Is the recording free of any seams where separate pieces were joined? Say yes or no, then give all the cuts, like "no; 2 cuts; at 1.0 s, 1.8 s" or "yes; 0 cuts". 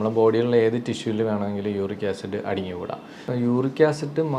no; 1 cut; at 3.3 s